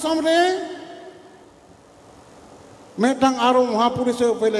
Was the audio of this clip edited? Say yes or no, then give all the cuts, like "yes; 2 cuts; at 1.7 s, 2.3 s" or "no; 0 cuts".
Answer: no; 0 cuts